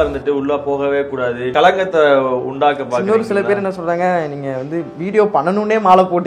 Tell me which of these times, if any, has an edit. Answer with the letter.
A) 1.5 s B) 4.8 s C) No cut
A